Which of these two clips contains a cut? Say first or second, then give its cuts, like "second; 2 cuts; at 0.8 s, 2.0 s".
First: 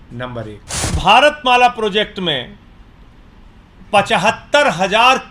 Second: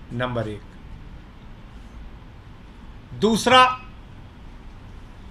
first; 1 cut; at 0.9 s